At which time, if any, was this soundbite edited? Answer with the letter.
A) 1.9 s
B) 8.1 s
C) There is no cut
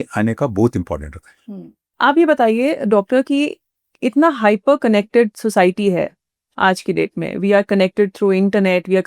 A